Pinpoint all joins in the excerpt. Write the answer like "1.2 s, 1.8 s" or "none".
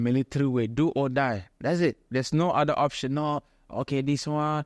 1.5 s